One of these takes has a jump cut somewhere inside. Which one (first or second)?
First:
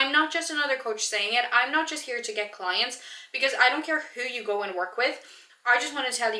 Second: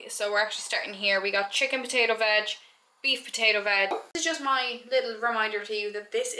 second